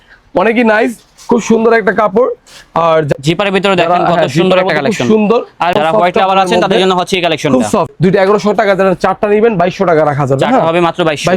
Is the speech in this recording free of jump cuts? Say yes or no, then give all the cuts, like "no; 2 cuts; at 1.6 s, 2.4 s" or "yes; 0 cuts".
no; 3 cuts; at 3.1 s, 5.7 s, 7.9 s